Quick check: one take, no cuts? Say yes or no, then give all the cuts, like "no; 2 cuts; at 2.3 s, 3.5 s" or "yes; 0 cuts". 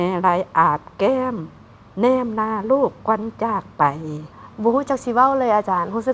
no; 1 cut; at 4.1 s